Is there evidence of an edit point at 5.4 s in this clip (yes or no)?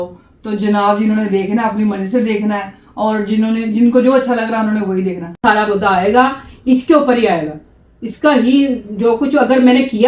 yes